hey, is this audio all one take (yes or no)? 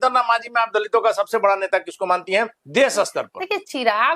yes